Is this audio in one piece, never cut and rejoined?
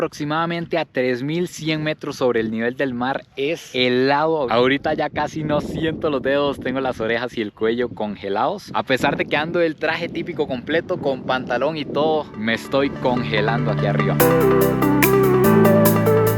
yes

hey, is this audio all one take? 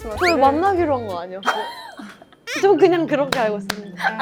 yes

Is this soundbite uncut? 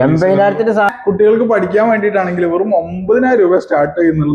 no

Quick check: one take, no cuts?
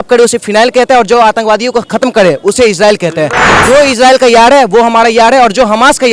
no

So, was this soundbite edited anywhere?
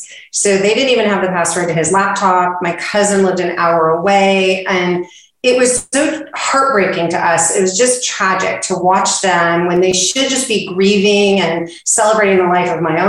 no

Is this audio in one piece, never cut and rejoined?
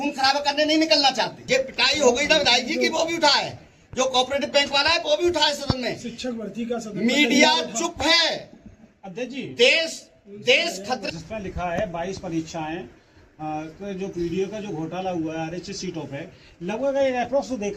no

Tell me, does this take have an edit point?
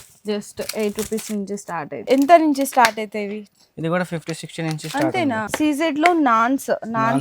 yes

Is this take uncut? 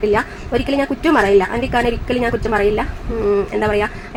yes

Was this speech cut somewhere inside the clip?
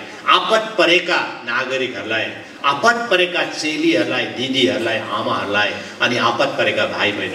no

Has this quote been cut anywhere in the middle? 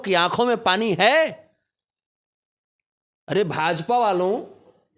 no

